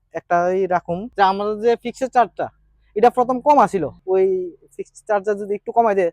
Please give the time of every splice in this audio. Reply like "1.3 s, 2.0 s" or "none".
1.0 s, 3.9 s